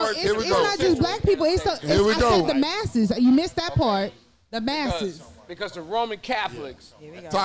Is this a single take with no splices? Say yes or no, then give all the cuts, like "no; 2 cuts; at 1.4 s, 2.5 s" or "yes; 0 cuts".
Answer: yes; 0 cuts